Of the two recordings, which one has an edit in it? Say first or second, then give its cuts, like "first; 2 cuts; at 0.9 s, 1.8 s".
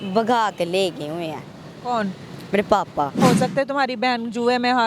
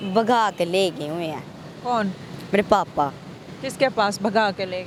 first; 1 cut; at 3.2 s